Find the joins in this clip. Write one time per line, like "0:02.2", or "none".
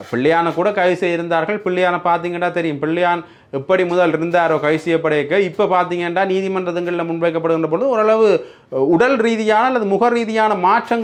none